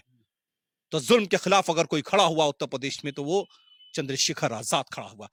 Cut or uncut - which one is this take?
uncut